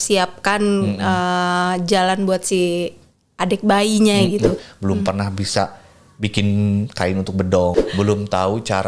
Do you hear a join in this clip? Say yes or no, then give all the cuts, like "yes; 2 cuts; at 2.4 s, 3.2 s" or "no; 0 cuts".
yes; 2 cuts; at 4.7 s, 7.8 s